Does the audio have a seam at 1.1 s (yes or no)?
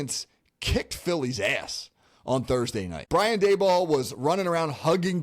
no